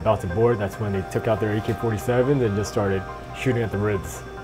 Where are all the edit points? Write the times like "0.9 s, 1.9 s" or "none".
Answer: none